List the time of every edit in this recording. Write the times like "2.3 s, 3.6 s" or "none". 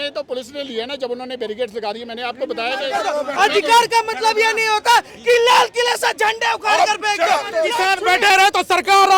2.9 s, 7.7 s